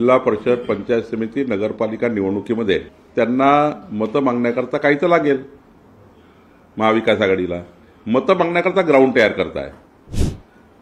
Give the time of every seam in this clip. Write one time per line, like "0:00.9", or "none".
0:03.0